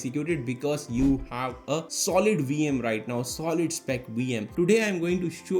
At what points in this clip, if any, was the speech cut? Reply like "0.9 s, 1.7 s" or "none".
4.5 s